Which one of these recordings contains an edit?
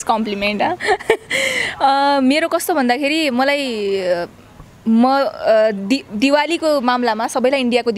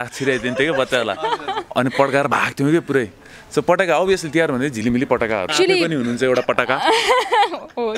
second; 1 cut; at 5.5 s

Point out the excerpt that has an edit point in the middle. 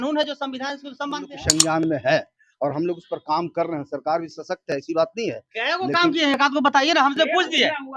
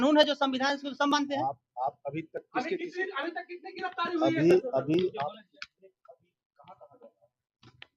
first; 1 cut; at 1.4 s

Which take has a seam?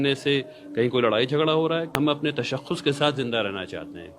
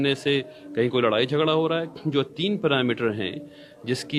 first; 1 cut; at 1.9 s

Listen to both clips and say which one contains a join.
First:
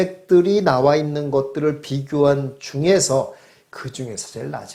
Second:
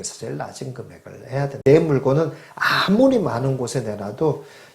second; 1 cut; at 1.6 s

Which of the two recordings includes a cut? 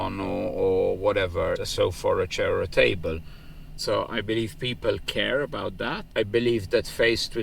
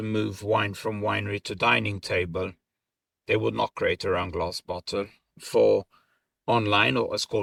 first; 3 cuts; at 1.6 s, 3.6 s, 6.1 s

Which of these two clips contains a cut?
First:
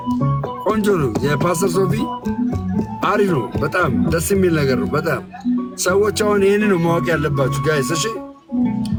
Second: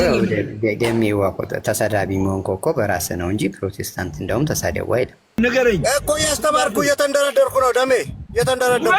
second; 1 cut; at 5.4 s

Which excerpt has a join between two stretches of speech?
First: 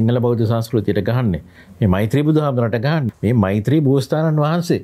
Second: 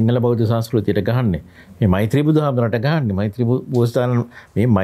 first; 1 cut; at 3.1 s

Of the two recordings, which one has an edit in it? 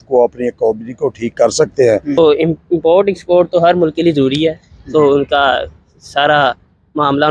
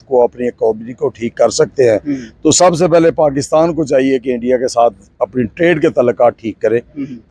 first; 1 cut; at 2.2 s

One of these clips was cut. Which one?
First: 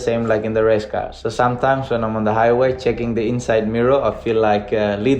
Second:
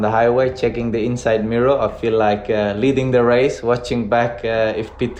first; 1 cut; at 1.1 s

